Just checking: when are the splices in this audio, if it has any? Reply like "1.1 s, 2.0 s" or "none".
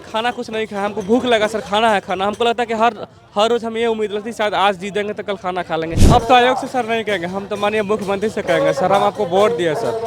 6.0 s